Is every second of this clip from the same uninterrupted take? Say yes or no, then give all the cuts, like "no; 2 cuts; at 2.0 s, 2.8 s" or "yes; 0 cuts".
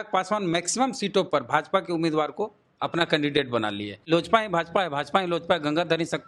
no; 1 cut; at 3.9 s